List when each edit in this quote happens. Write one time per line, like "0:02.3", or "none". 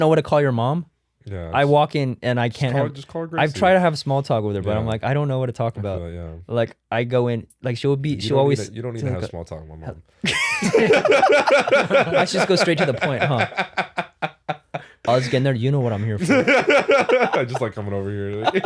0:16.2